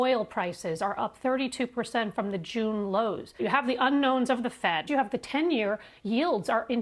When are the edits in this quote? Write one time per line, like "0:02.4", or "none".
0:03.4
0:04.9